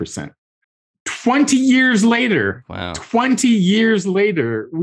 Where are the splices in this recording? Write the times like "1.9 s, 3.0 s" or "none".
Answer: none